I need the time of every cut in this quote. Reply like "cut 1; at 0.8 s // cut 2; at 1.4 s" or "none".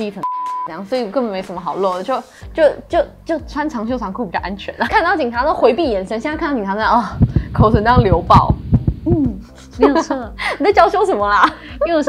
cut 1; at 4.8 s